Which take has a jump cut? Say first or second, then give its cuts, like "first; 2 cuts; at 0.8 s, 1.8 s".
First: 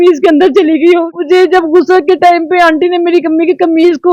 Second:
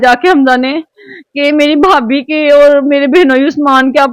first; 1 cut; at 1.1 s